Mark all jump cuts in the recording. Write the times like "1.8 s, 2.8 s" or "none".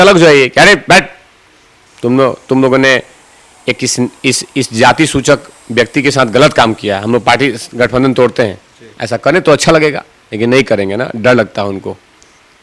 10.5 s